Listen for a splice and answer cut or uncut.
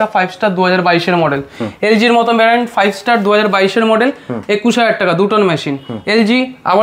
uncut